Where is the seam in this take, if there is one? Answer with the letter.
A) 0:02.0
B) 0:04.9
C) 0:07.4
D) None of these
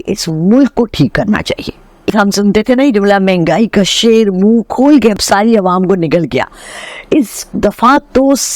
A